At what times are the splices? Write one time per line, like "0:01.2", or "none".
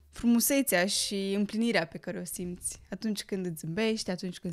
none